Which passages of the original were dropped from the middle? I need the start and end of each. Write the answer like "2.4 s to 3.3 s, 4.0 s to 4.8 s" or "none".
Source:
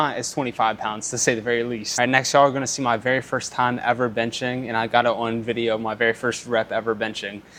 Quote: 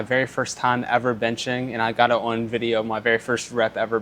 none